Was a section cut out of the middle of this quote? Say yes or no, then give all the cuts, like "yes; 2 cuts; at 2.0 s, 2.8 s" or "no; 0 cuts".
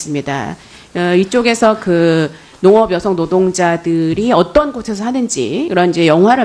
yes; 1 cut; at 3.3 s